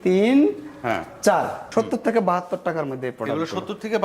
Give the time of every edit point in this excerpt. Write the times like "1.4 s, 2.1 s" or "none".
1.6 s